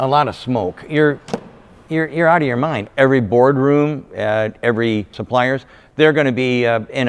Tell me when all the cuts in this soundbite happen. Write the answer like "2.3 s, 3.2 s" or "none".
2.9 s, 5.2 s